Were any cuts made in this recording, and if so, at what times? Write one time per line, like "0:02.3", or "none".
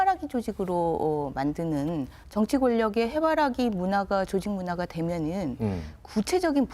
0:02.2